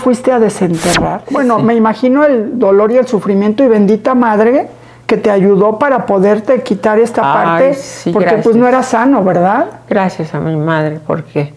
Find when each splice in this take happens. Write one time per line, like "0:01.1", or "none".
0:01.2